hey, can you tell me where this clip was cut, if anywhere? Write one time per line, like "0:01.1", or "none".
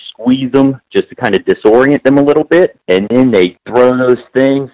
0:02.8
0:03.6